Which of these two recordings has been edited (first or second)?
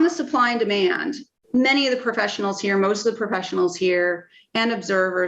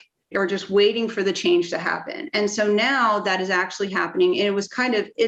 first